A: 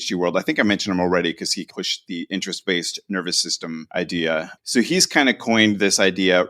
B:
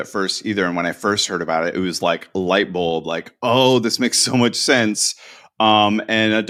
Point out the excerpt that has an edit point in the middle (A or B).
A